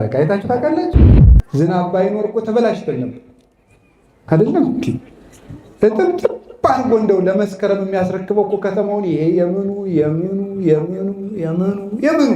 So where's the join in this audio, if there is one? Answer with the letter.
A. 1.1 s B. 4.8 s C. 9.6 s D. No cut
A